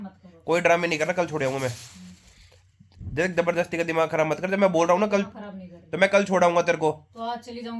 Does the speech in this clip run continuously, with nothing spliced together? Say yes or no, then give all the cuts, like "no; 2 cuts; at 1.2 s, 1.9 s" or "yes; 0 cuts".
yes; 0 cuts